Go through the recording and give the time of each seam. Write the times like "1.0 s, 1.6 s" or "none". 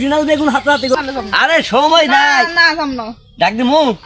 0.9 s